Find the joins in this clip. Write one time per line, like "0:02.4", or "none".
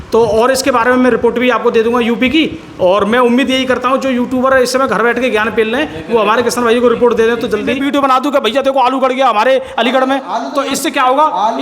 0:07.8